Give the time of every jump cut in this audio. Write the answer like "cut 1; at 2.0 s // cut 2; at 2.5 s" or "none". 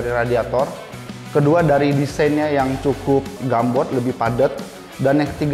cut 1; at 3.4 s